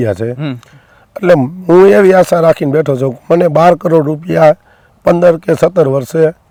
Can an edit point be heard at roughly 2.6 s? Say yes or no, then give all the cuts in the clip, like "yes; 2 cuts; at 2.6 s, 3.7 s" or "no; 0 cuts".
no; 0 cuts